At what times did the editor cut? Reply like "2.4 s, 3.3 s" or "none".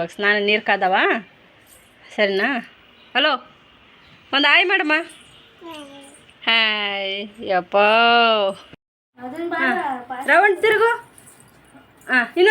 8.7 s